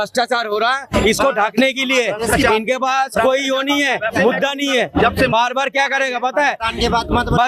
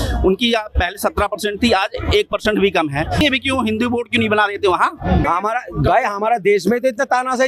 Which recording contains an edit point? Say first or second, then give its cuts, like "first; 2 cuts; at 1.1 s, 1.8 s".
second; 2 cuts; at 3.2 s, 5.3 s